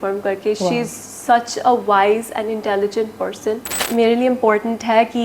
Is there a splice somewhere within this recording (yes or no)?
yes